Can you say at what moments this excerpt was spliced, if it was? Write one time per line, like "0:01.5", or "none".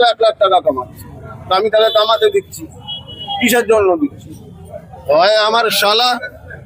none